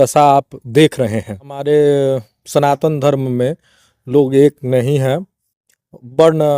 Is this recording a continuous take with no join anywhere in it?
no; 1 cut; at 1.6 s

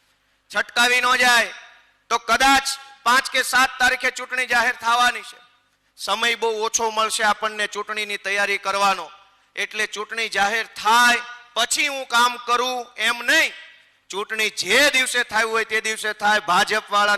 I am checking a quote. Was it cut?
no; 0 cuts

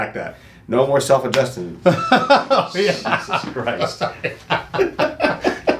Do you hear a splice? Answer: no; 0 cuts

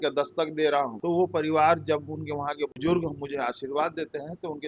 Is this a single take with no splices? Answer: no; 2 cuts; at 1.0 s, 2.8 s

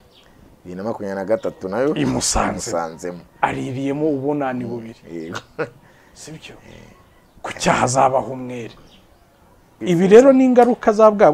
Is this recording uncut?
no; 1 cut; at 9.8 s

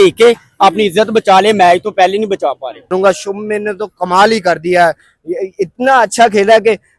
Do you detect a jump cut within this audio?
yes; 1 cut; at 2.9 s

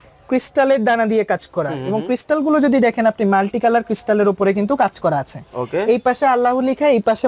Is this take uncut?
yes; 0 cuts

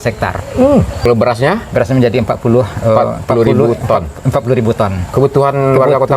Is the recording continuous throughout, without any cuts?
no; 1 cut; at 1.0 s

